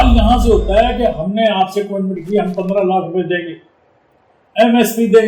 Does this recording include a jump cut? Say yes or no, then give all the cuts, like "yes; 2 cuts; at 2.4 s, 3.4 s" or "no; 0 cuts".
no; 0 cuts